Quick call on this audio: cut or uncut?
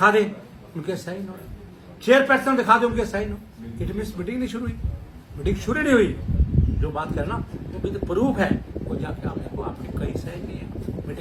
uncut